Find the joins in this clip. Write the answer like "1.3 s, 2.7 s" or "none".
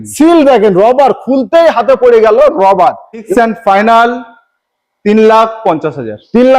3.3 s